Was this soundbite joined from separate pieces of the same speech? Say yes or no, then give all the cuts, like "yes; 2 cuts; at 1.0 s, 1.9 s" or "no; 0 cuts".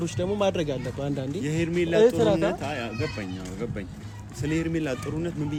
no; 0 cuts